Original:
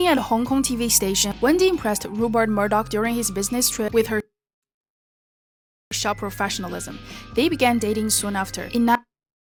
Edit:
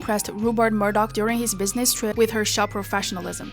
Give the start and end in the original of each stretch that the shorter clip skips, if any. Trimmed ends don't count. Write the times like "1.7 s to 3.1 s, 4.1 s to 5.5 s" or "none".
4.3 s to 6.0 s